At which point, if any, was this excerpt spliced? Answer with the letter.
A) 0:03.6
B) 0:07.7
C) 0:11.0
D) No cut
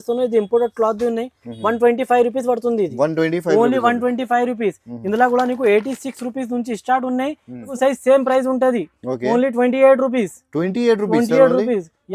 B